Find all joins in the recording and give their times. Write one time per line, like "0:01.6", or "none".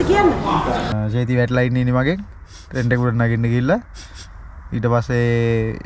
0:00.9